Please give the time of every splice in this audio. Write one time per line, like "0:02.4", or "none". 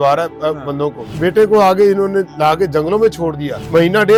none